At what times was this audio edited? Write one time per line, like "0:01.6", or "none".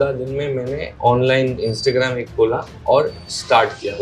none